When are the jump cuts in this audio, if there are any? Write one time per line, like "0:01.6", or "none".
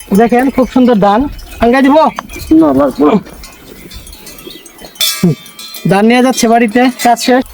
none